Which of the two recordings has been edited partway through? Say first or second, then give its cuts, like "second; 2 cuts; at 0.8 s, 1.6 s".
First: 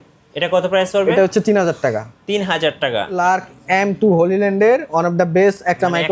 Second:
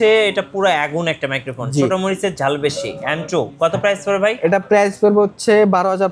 first; 1 cut; at 3.2 s